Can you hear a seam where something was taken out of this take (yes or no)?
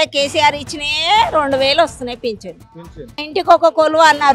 yes